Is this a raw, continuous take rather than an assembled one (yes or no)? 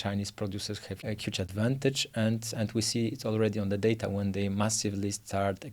no